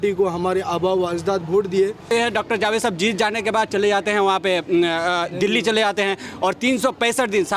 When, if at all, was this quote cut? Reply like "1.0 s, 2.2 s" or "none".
2.0 s